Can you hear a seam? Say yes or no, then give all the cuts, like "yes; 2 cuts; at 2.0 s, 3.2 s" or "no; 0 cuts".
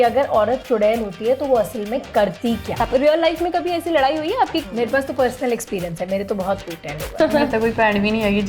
yes; 3 cuts; at 2.7 s, 4.6 s, 7.2 s